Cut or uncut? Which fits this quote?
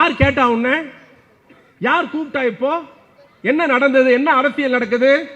uncut